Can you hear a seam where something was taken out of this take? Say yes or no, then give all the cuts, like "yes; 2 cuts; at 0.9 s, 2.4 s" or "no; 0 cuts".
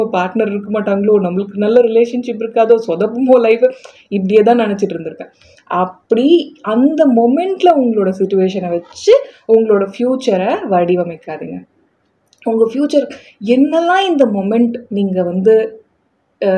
no; 0 cuts